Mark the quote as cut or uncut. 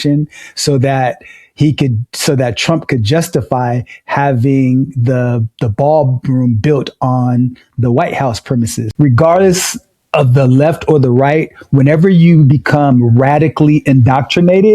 cut